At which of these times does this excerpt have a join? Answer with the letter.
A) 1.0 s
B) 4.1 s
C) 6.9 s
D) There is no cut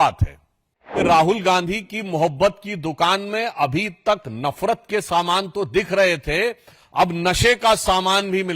A